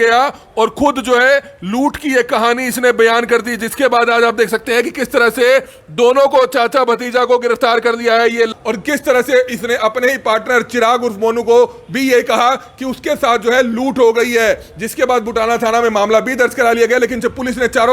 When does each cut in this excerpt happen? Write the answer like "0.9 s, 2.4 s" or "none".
8.5 s